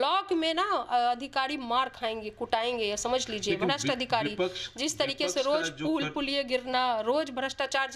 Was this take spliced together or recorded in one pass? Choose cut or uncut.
uncut